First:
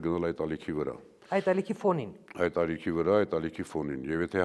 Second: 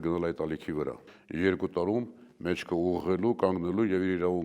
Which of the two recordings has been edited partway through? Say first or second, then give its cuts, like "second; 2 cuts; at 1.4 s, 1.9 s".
second; 1 cut; at 1.1 s